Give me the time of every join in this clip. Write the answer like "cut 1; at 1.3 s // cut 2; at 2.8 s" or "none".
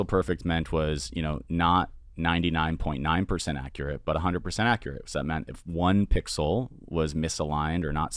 none